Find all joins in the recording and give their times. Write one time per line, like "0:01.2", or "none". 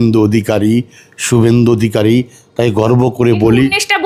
none

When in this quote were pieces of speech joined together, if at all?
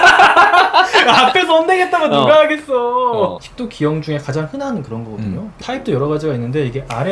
0:03.4
0:05.6

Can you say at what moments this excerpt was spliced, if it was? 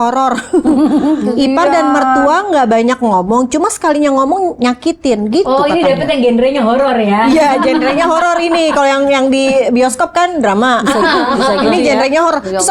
none

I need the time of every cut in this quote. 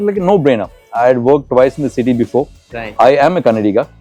none

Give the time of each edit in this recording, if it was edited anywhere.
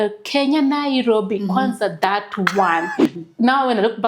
0:03.1

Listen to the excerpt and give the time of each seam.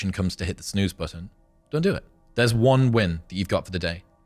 0:02.2

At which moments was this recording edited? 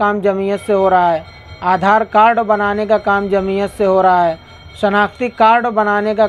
none

